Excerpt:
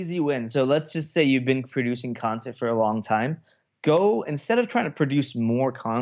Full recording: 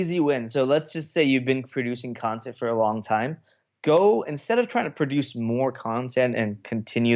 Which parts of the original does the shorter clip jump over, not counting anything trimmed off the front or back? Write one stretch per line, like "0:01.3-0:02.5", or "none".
none